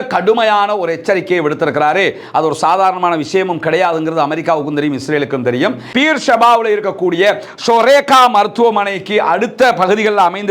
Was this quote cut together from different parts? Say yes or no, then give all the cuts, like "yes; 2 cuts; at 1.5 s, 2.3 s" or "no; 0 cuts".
yes; 1 cut; at 5.8 s